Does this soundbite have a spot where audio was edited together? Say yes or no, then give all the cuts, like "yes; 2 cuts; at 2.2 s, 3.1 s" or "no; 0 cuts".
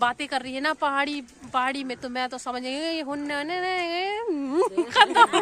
no; 0 cuts